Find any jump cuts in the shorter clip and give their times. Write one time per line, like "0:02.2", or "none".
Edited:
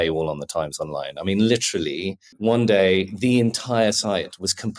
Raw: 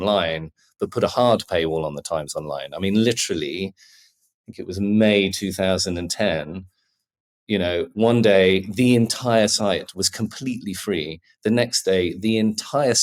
0:02.3